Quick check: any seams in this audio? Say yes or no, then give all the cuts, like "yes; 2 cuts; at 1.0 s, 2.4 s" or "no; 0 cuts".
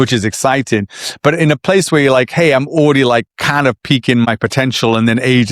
yes; 1 cut; at 4.3 s